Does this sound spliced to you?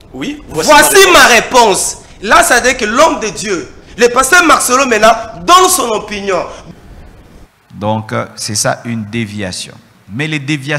yes; 1 cut; at 6.6 s

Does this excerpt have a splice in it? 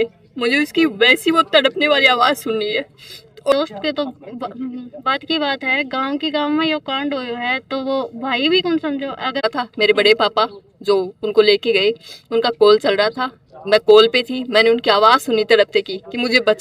yes; 2 cuts; at 3.5 s, 9.4 s

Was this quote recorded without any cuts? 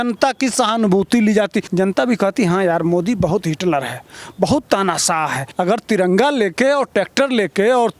no; 2 cuts; at 1.6 s, 5.4 s

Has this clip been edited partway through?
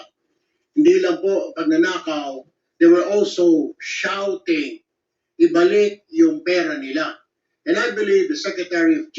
no; 0 cuts

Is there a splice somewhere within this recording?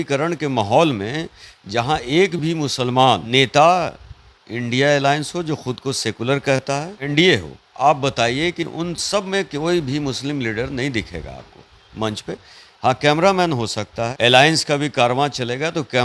yes; 3 cuts; at 3.2 s, 7.1 s, 14.0 s

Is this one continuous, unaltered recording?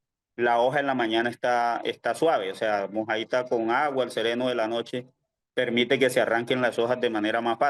yes; 0 cuts

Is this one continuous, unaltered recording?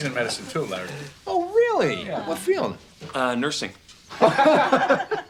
yes; 0 cuts

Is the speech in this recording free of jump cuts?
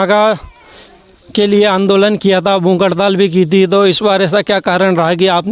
yes; 0 cuts

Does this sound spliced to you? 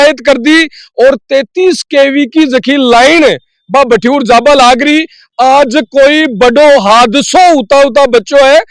no; 0 cuts

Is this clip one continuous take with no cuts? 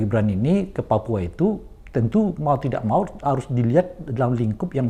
yes; 0 cuts

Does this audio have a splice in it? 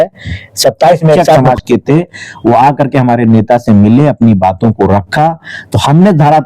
yes; 1 cut; at 1.4 s

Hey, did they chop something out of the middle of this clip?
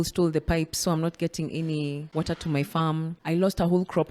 yes; 2 cuts; at 2.0 s, 3.2 s

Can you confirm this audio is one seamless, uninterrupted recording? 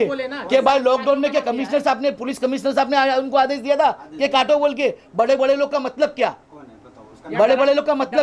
yes; 0 cuts

